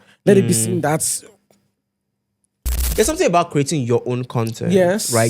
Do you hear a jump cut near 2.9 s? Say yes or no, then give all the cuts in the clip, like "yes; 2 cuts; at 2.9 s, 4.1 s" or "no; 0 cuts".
yes; 1 cut; at 2.9 s